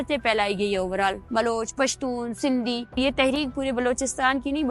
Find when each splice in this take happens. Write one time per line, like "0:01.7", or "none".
0:01.2
0:03.0